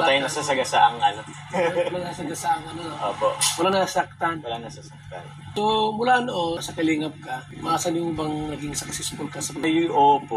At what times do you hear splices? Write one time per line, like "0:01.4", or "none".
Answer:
none